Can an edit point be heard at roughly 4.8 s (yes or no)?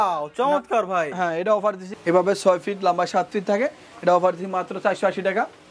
no